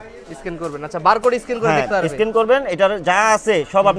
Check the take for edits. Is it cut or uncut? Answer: uncut